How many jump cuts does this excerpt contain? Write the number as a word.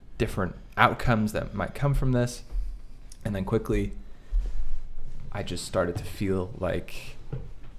zero